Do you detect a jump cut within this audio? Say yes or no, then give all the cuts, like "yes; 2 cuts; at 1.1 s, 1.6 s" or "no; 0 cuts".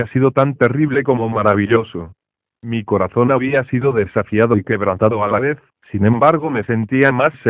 no; 0 cuts